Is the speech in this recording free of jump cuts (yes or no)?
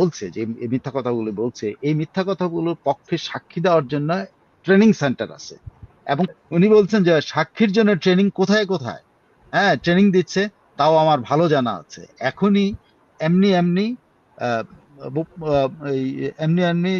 no